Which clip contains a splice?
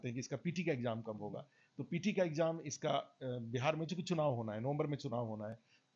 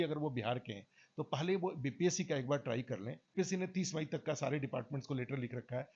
second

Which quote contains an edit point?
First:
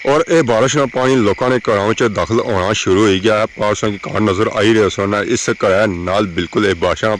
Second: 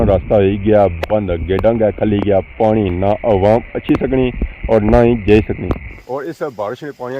second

